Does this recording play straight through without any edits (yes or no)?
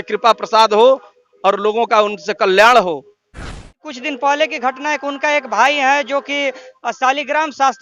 no